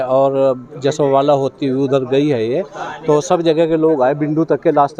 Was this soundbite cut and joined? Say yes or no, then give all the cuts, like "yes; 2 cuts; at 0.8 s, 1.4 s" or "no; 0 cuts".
no; 0 cuts